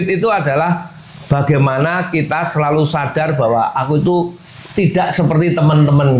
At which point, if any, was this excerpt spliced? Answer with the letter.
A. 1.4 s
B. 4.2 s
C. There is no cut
C